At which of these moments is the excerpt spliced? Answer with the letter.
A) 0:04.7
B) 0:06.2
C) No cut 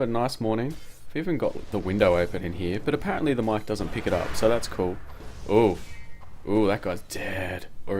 A